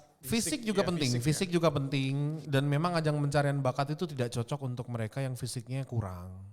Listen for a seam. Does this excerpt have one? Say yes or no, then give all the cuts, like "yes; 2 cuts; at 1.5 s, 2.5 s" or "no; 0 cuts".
no; 0 cuts